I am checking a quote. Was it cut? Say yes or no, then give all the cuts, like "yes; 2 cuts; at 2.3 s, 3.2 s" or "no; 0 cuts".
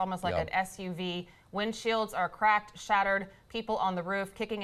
no; 0 cuts